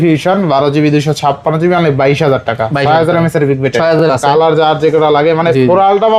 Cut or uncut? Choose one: cut